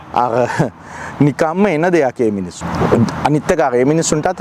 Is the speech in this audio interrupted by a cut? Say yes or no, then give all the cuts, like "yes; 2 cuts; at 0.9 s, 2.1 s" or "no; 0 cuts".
no; 0 cuts